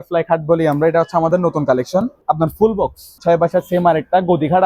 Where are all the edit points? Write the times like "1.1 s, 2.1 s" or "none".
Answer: 2.2 s, 3.2 s